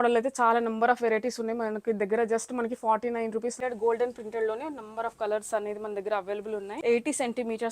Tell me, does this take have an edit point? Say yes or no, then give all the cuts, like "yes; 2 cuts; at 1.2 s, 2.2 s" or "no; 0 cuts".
yes; 2 cuts; at 3.6 s, 6.7 s